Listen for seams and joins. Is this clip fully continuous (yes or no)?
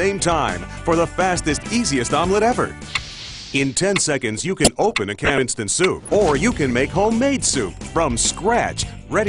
no